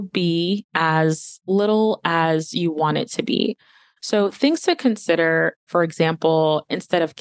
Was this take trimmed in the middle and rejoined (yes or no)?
yes